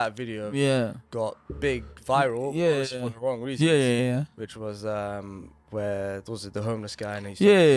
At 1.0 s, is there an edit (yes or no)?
yes